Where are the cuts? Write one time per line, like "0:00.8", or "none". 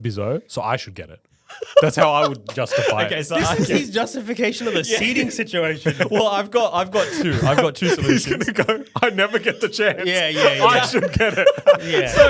none

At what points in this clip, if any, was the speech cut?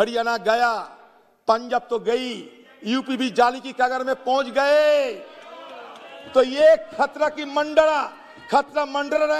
none

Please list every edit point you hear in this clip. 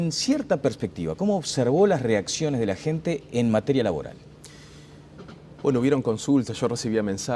0:01.5

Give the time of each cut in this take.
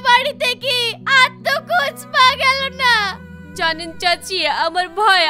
none

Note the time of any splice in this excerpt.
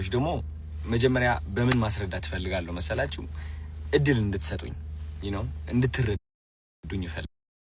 none

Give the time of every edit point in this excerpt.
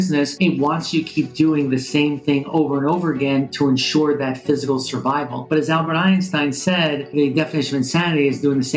none

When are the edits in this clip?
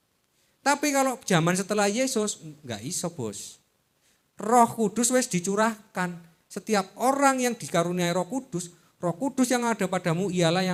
none

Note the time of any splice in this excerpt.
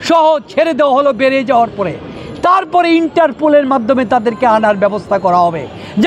none

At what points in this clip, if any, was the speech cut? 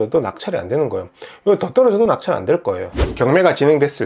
0:02.9

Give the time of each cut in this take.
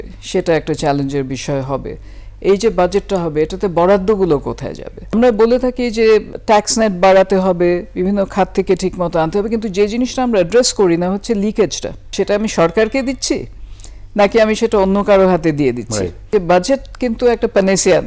0:05.1
0:06.3
0:12.0
0:16.2

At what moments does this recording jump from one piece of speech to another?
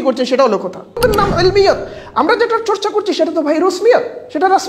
0:01.0

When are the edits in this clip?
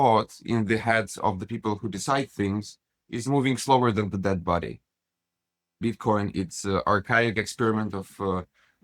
0:05.8

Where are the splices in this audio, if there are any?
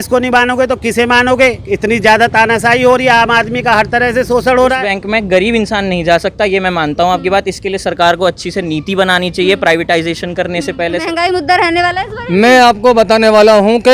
0:04.8
0:11.0

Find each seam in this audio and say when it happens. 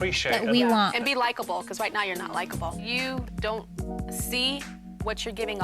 0:02.8

